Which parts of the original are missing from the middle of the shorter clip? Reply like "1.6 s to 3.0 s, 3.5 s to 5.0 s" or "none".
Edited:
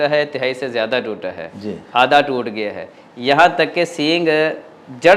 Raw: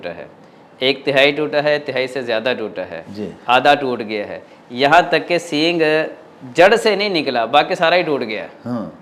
none

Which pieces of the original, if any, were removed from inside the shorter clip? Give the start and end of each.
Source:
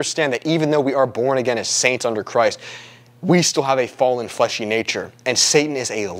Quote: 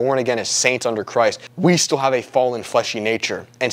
2.7 s to 3.1 s

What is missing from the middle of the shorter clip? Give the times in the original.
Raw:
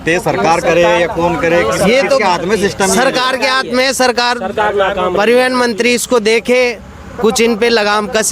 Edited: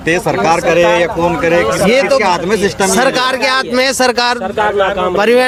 none

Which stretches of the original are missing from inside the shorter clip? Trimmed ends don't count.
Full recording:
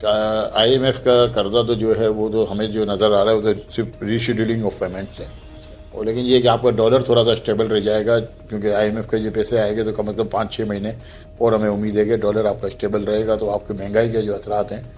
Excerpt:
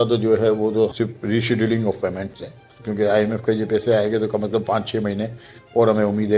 2.5 s to 3.7 s, 5.6 s to 8.4 s

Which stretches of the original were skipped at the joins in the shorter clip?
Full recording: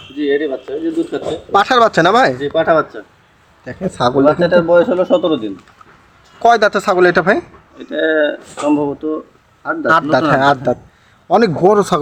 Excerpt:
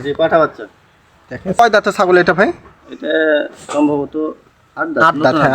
3.9 s to 6.5 s

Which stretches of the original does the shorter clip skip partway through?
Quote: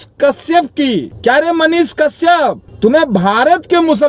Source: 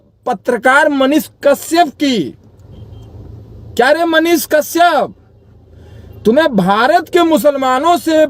2.3 s to 3.6 s, 5.2 s to 6.1 s

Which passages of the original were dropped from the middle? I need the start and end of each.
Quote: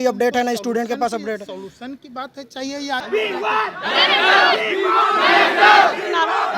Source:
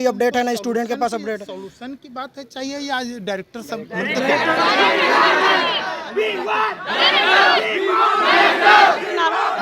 3.0 s to 6.1 s

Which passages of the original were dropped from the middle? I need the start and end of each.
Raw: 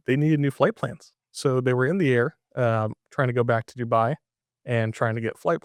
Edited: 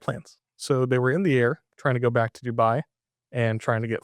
2.4 s to 3.0 s

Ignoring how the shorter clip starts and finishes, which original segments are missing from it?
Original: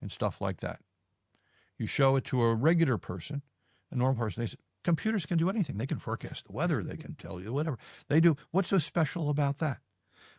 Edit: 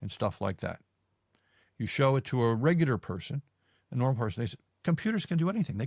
none

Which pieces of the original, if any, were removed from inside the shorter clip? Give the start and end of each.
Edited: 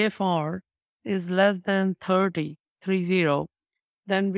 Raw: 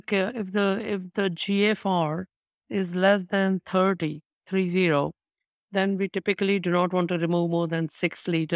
none

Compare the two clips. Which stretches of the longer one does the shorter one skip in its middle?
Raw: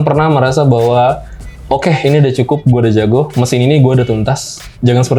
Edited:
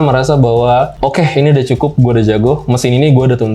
1.2 s to 1.6 s

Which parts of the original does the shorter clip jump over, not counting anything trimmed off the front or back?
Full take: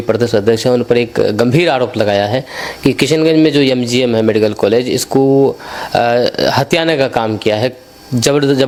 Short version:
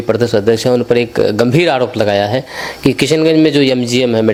none

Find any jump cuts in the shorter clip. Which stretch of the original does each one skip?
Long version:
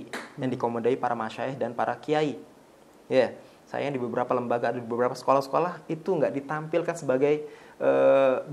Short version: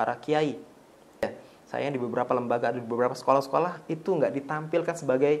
3.0 s to 3.2 s

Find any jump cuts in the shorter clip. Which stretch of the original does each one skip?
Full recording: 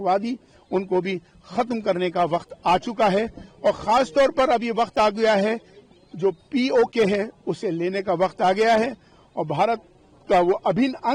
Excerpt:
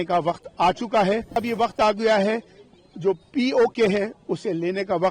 3.5 s to 4.6 s

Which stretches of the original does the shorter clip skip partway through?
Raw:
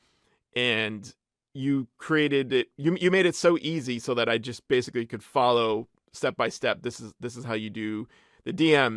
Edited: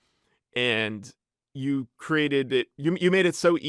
none

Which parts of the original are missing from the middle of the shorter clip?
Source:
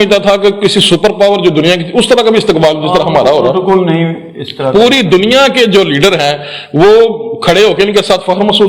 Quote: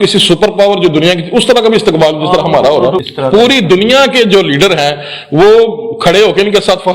3.6 s to 4.4 s

